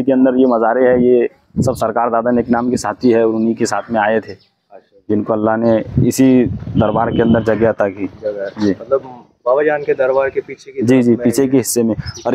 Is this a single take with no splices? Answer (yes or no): yes